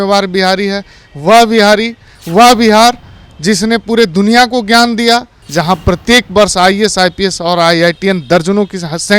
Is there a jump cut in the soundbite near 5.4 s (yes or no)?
yes